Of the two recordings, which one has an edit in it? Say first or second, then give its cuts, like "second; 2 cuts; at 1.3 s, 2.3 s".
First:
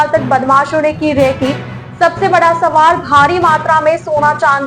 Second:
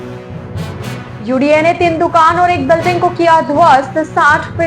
second; 1 cut; at 1.1 s